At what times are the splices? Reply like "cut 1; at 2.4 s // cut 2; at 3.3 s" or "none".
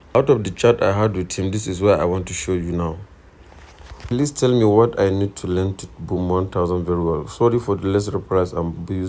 cut 1; at 4.0 s